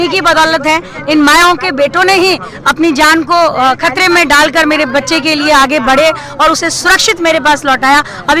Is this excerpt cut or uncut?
uncut